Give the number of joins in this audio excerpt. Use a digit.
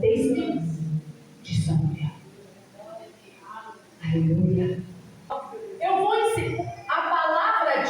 1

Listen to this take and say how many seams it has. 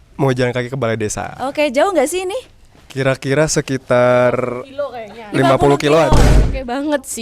1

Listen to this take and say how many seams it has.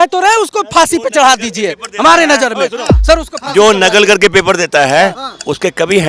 0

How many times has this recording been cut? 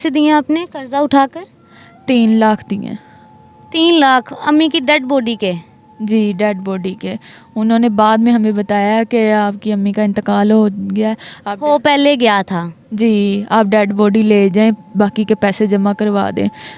0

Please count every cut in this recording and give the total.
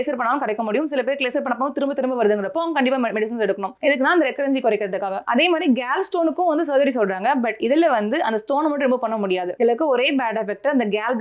0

